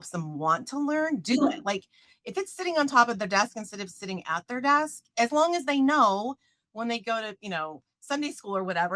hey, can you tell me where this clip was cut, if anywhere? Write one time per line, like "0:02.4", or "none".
none

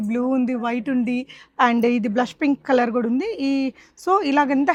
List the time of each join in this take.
none

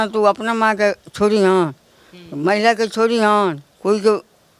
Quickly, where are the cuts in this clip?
none

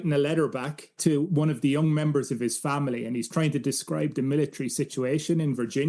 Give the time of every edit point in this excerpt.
0:00.9

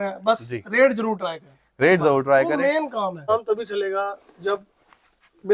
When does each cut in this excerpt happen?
0:03.2

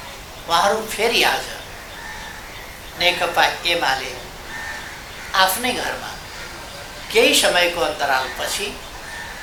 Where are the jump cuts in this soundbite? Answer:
none

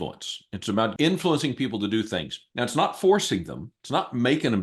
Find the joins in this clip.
0:00.9

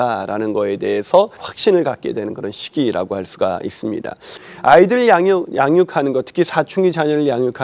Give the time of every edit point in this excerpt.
0:01.4
0:04.3

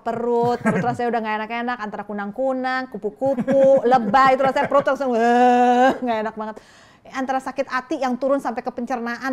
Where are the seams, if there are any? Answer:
none

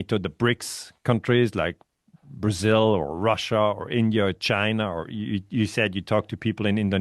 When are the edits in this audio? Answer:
none

